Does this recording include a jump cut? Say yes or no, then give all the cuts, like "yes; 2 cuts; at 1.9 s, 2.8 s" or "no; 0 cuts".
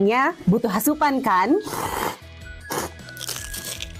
no; 0 cuts